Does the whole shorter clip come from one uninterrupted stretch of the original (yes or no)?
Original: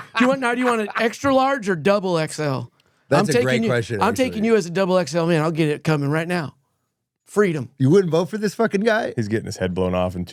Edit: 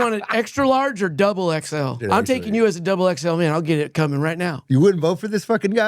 no